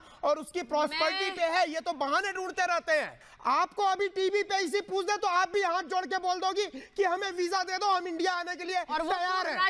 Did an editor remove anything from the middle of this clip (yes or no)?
yes